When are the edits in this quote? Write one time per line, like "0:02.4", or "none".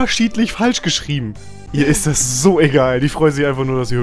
0:01.7